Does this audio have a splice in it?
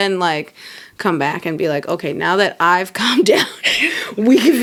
no; 0 cuts

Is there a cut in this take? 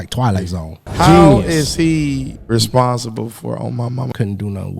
yes; 3 cuts; at 0.9 s, 2.3 s, 4.1 s

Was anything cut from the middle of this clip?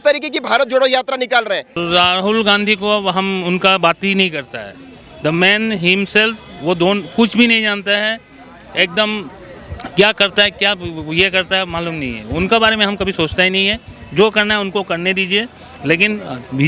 yes; 1 cut; at 1.7 s

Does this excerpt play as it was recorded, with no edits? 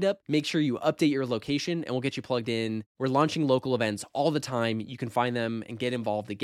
yes; 0 cuts

